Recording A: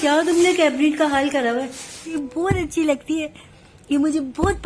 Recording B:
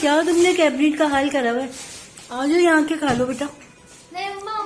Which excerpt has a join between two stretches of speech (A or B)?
A